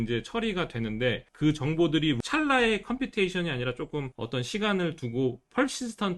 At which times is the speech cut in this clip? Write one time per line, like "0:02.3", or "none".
0:01.3
0:02.2
0:04.2